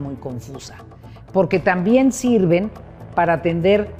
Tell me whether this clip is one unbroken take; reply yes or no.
yes